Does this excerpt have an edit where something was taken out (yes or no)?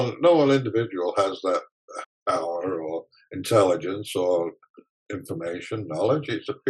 yes